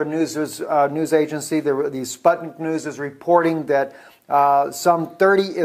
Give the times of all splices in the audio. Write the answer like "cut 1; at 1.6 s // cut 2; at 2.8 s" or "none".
cut 1; at 2.5 s